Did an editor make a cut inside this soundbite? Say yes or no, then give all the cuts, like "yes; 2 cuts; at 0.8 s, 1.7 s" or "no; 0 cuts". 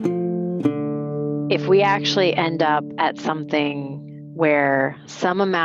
yes; 1 cut; at 1.5 s